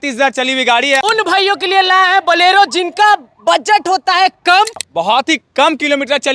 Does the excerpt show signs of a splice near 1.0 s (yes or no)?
yes